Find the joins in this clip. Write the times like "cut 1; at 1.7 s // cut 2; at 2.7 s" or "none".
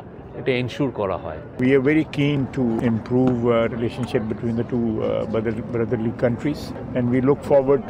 cut 1; at 1.6 s // cut 2; at 2.8 s // cut 3; at 6.7 s